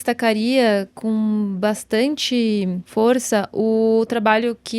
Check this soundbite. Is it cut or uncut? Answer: cut